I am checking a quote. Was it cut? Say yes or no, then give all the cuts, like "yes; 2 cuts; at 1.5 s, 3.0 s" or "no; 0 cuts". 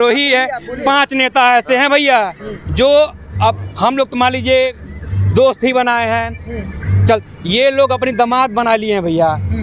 no; 0 cuts